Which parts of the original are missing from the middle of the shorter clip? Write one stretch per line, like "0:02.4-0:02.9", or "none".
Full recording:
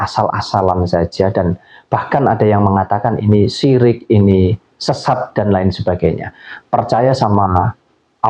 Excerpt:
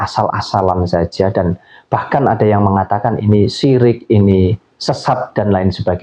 none